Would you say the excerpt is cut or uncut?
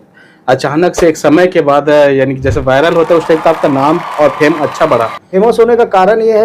cut